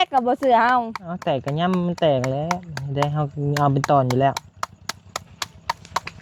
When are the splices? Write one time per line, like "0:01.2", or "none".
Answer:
none